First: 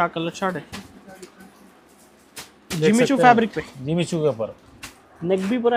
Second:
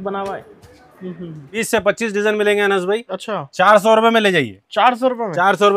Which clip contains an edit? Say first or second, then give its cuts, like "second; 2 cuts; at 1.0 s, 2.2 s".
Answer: second; 1 cut; at 1.6 s